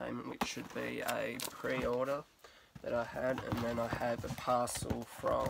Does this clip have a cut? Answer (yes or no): yes